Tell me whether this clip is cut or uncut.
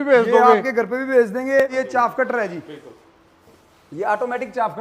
cut